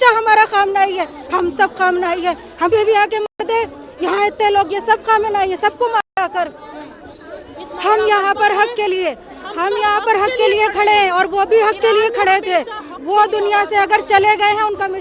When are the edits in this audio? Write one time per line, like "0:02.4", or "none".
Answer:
none